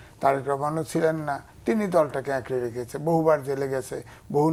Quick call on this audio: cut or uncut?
uncut